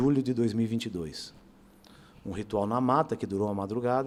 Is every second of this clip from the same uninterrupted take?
yes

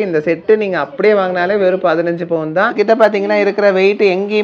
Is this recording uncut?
no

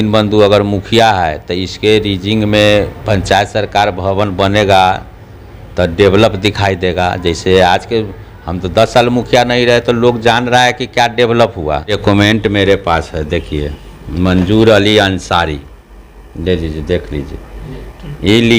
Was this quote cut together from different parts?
yes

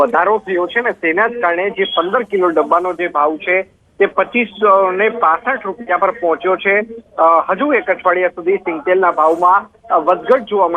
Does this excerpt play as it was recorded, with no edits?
no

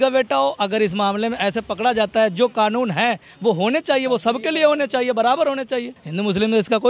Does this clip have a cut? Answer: yes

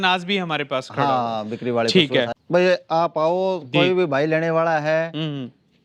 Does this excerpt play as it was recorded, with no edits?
no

